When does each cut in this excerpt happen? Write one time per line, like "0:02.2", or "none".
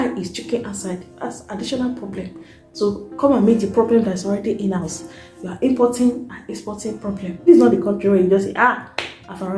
0:07.3